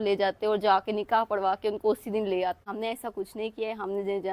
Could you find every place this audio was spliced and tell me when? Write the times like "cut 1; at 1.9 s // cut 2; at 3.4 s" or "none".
cut 1; at 2.7 s